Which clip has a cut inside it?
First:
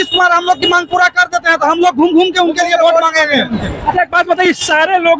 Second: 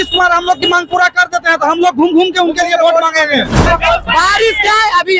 second; 1 cut; at 3.7 s

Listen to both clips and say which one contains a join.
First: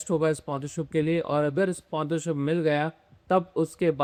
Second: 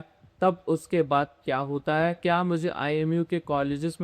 second; 1 cut; at 2.2 s

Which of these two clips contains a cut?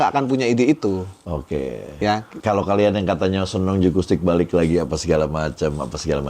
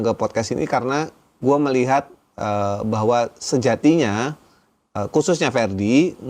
first; 1 cut; at 2.3 s

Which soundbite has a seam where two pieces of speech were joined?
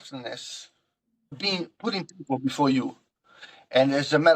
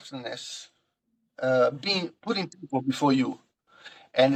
first; 1 cut; at 1.3 s

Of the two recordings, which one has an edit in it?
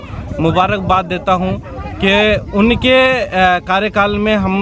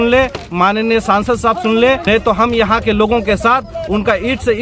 second; 1 cut; at 2.0 s

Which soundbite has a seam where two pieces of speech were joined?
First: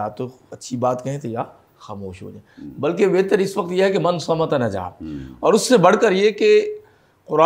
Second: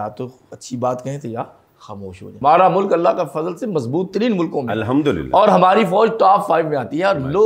second; 1 cut; at 2.3 s

